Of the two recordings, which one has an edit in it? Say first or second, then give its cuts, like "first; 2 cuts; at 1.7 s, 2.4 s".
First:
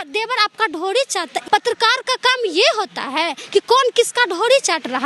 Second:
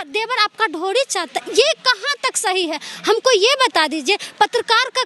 first; 1 cut; at 1.4 s